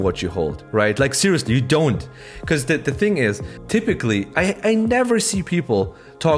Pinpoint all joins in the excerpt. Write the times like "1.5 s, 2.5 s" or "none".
3.5 s